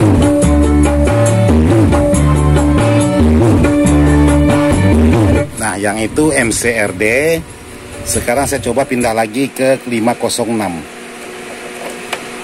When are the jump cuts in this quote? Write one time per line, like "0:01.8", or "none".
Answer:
none